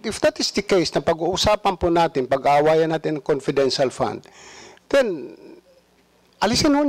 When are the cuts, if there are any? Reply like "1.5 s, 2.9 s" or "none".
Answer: none